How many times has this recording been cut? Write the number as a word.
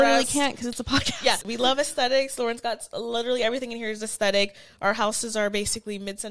one